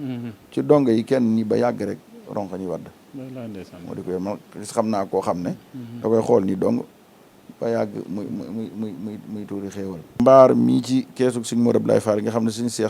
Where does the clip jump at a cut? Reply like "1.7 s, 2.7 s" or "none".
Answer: 10.2 s